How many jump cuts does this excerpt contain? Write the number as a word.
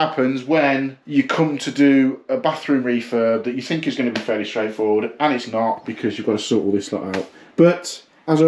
one